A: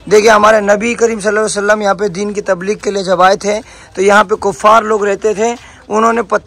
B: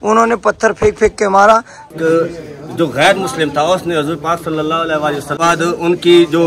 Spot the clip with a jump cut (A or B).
B